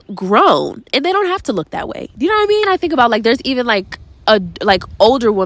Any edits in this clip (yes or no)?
no